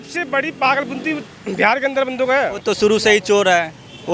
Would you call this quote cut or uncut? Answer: cut